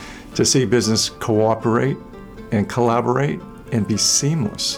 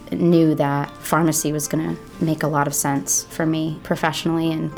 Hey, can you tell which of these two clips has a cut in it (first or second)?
second